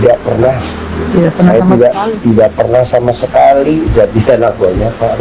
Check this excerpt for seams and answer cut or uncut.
uncut